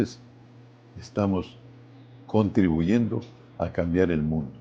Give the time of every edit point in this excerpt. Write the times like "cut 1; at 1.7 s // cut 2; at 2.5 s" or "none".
none